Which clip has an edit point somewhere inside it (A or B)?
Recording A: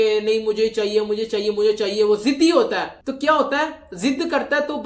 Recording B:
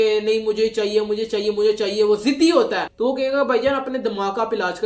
B